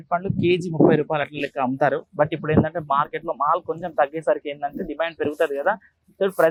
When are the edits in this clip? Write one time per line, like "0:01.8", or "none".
none